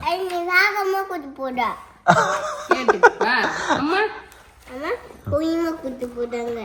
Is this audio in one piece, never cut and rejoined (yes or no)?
yes